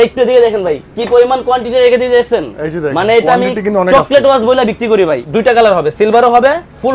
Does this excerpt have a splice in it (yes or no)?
yes